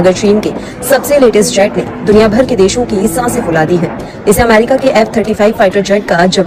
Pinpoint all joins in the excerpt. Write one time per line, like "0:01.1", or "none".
none